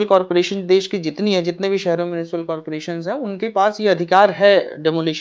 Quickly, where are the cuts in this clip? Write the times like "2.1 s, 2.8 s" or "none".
none

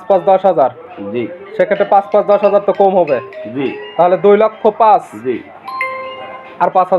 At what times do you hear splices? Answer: none

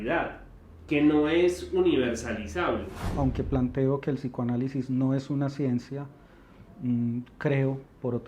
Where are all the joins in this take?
3.1 s

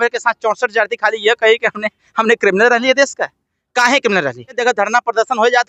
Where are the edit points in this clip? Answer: 4.6 s

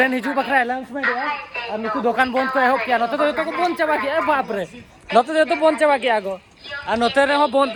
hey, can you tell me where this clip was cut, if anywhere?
none

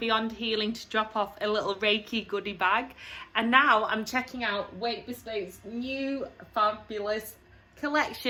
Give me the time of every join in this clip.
none

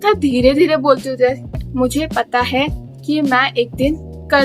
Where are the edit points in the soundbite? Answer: 1.6 s

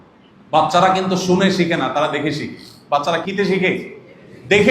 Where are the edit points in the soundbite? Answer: 3.2 s

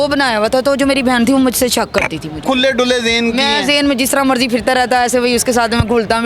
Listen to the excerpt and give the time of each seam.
2.4 s

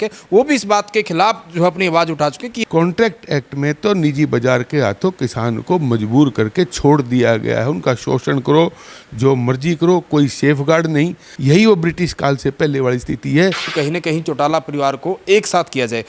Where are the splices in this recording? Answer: 2.5 s, 11.3 s, 13.7 s

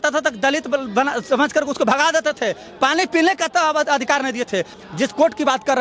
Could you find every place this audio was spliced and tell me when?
4.7 s

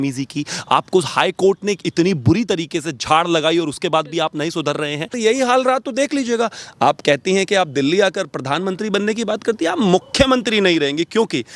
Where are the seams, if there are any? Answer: 5.2 s

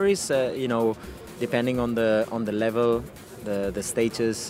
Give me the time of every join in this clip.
none

